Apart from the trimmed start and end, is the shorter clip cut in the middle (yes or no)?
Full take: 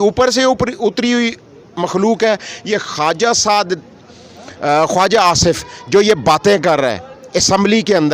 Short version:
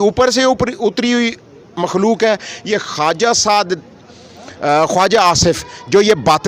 no